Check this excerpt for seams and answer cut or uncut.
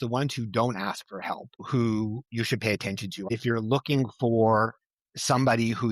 cut